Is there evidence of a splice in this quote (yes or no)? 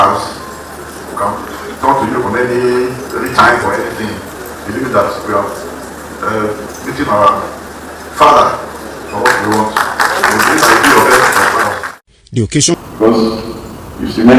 yes